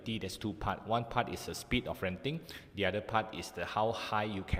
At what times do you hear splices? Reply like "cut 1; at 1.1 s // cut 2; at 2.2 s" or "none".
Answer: none